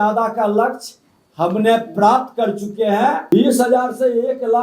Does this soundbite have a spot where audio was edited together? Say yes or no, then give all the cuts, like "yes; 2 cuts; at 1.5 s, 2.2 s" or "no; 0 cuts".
yes; 1 cut; at 3.3 s